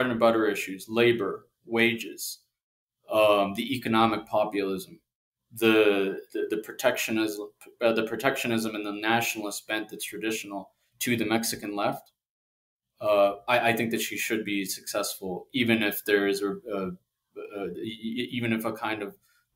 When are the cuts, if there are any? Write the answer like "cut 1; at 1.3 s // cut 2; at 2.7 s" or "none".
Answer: none

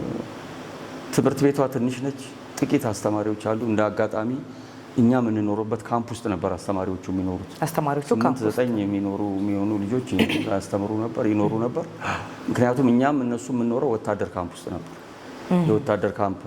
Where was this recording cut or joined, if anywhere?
none

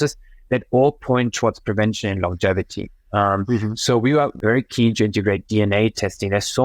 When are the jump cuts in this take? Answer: cut 1; at 4.4 s

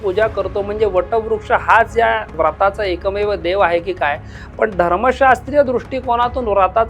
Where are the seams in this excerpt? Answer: cut 1; at 2.3 s

